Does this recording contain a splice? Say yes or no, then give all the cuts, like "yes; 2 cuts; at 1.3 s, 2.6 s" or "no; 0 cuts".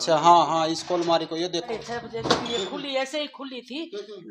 yes; 1 cut; at 1.7 s